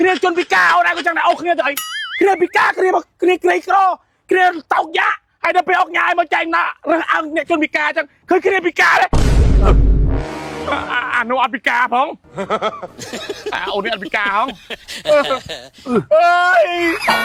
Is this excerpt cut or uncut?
uncut